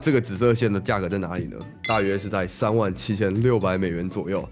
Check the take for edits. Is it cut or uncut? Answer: uncut